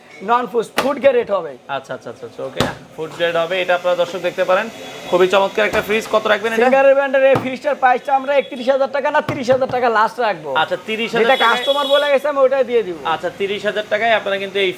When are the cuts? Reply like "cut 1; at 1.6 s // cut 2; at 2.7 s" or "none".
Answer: none